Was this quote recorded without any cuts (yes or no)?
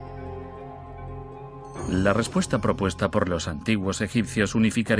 no